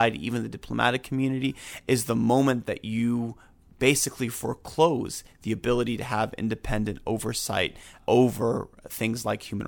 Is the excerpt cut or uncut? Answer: cut